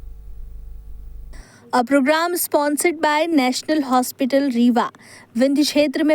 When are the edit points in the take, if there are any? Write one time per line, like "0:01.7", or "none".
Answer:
0:01.3